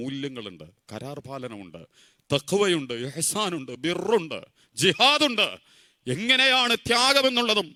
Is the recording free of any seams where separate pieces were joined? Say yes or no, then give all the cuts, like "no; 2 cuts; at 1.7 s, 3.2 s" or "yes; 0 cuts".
yes; 0 cuts